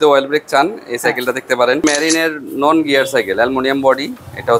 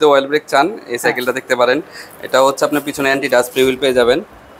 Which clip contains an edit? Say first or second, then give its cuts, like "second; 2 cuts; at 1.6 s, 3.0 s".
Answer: first; 1 cut; at 1.8 s